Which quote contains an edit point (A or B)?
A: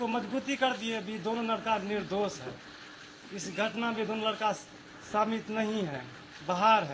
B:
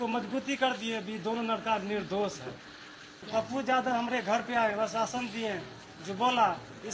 B